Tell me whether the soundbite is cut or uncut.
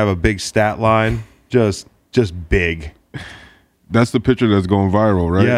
uncut